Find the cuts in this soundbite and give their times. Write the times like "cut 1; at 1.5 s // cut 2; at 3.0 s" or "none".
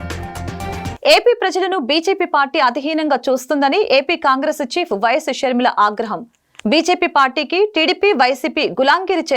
cut 1; at 0.9 s